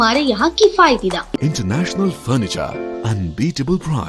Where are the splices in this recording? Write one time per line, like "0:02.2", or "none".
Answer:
0:01.4